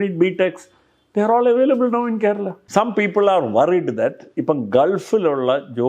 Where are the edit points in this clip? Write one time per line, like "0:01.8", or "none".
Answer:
0:02.5